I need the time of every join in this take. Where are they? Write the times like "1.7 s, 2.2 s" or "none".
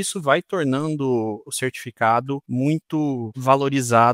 1.5 s, 2.4 s, 3.3 s